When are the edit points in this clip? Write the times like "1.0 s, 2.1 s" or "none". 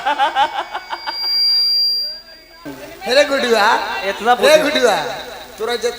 2.8 s